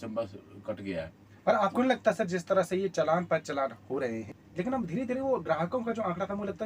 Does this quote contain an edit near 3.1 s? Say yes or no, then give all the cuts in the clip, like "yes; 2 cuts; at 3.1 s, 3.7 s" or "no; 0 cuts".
no; 1 cut; at 4.4 s